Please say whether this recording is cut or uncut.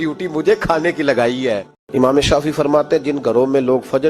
cut